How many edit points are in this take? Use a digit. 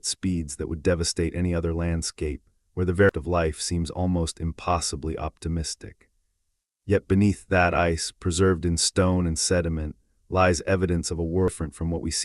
2